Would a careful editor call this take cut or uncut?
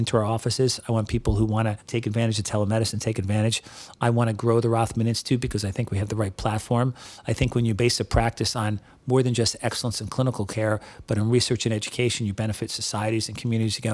cut